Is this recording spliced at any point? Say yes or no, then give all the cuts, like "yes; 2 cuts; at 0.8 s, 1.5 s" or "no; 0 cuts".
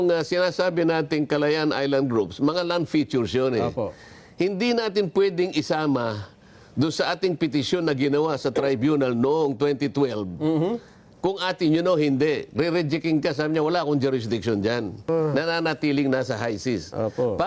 yes; 1 cut; at 15.1 s